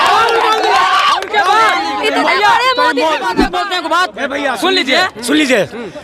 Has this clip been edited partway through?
yes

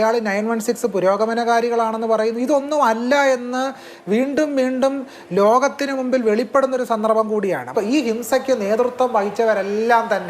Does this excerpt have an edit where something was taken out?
yes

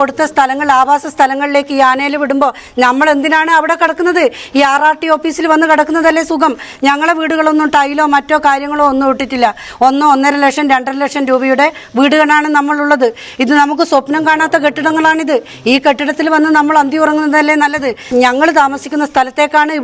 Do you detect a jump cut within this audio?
yes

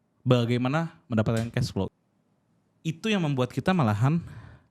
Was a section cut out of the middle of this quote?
yes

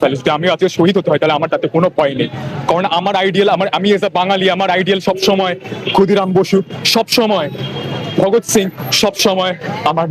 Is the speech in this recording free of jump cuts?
yes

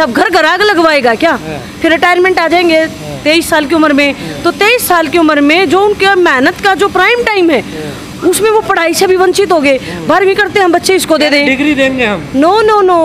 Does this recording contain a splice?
no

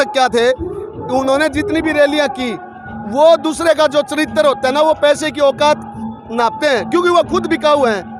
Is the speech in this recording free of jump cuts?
yes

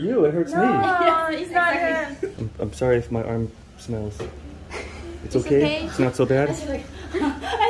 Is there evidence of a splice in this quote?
yes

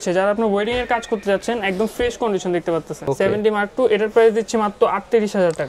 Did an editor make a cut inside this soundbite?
no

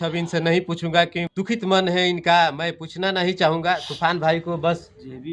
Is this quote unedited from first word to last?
yes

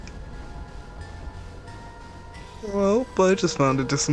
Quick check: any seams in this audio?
no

